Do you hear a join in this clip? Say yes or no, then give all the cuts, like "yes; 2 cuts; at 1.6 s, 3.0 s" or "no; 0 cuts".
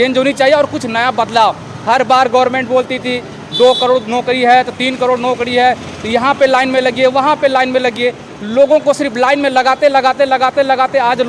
no; 0 cuts